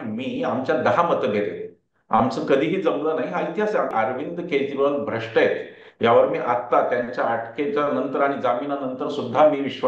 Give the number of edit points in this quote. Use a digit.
1